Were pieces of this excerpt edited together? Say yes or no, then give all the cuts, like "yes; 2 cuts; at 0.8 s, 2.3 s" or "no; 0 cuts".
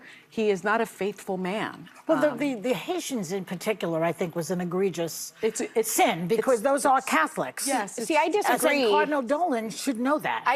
no; 0 cuts